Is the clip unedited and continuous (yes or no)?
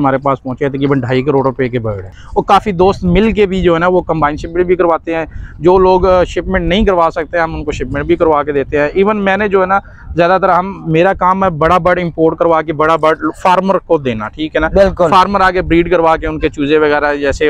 yes